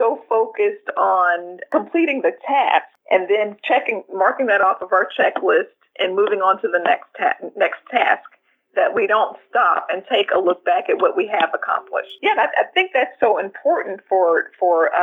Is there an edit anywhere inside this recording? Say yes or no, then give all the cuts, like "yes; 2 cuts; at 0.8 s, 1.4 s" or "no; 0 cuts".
yes; 2 cuts; at 1.5 s, 3.0 s